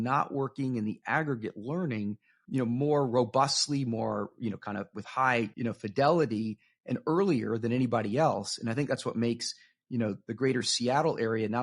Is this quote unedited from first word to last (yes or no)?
no